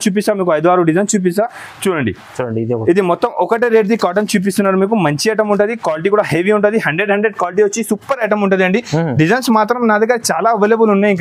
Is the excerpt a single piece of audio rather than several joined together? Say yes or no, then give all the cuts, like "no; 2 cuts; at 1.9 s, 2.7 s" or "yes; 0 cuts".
yes; 0 cuts